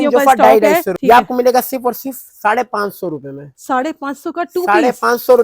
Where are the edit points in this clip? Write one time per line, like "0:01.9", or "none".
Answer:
0:00.9